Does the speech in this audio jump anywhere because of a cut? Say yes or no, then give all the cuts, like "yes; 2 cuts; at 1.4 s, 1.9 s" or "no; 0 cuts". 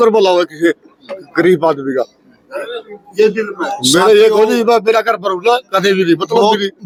no; 0 cuts